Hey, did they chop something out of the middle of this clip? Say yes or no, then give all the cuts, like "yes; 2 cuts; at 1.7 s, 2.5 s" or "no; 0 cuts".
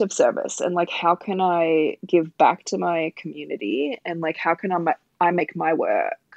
no; 0 cuts